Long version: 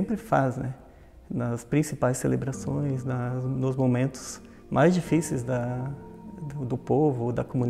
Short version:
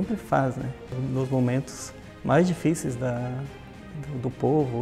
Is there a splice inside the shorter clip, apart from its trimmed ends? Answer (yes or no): yes